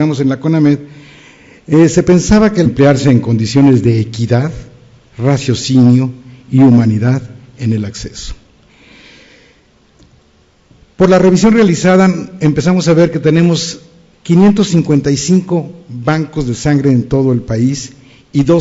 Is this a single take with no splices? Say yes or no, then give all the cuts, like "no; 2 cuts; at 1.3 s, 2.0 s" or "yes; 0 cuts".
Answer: yes; 0 cuts